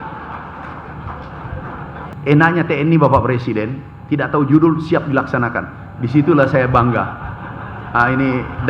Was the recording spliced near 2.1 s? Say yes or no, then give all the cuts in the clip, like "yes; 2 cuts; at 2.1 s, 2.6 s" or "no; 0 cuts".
yes; 1 cut; at 2.1 s